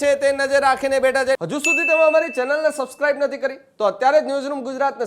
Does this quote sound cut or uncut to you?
cut